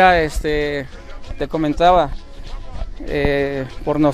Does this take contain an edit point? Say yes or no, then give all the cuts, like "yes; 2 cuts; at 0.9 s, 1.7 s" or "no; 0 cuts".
no; 0 cuts